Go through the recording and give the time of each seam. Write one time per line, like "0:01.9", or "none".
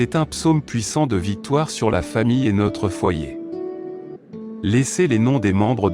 0:03.2
0:04.6

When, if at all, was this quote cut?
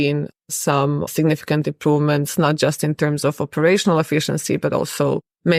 0:00.9

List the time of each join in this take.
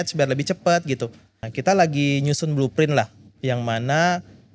0:01.4

